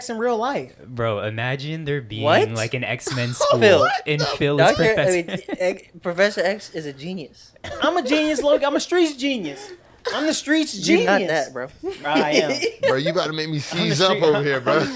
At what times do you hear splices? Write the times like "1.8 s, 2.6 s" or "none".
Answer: 11.7 s